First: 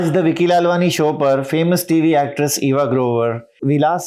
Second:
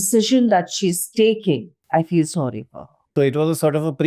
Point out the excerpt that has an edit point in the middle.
second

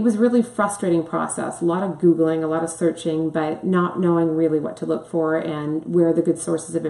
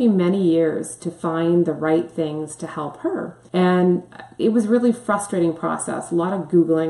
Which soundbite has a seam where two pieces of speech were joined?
second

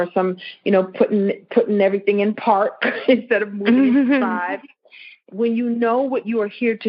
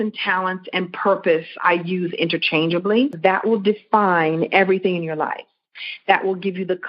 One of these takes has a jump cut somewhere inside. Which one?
second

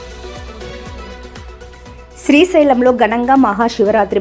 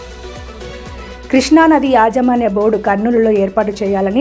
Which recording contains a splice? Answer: second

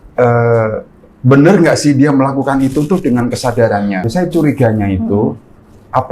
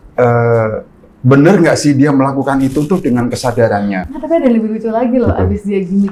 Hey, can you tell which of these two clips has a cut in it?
first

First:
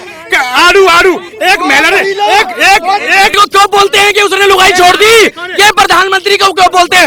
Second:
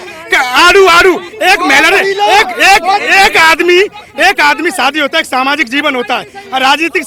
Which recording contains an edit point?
first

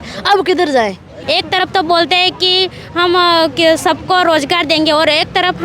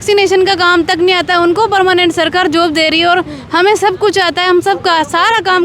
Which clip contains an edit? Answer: first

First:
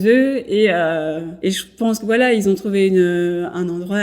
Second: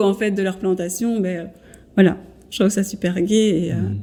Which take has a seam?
first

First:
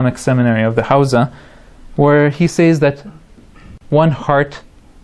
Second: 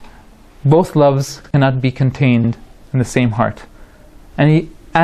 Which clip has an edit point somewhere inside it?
first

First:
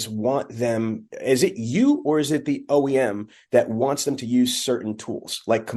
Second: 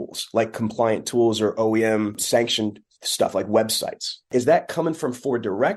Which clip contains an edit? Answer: second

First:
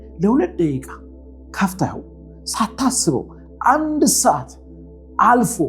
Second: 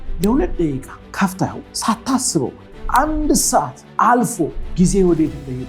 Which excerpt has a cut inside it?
second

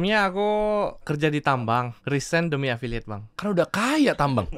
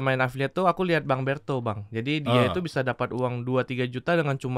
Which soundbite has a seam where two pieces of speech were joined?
first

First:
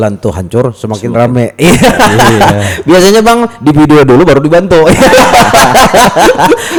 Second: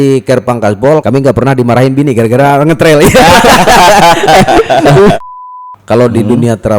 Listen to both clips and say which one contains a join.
second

